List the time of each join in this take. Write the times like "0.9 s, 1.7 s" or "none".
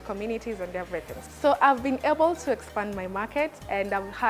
1.3 s